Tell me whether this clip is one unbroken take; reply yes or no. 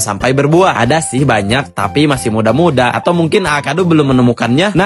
yes